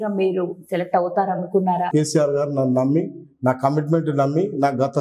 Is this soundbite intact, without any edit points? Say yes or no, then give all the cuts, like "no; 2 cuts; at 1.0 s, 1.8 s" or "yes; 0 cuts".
no; 1 cut; at 1.9 s